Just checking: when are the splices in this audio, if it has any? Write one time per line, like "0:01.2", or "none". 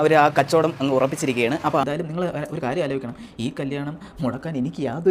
0:01.8